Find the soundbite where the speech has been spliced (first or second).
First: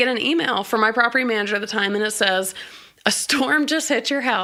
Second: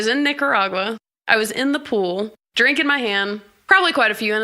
second